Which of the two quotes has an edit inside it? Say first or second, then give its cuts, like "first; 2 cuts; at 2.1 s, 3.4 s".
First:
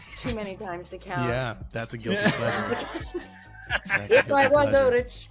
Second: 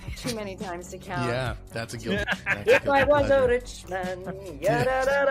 second; 1 cut; at 2.2 s